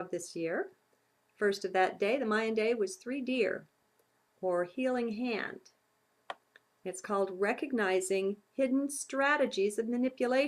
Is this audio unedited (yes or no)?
no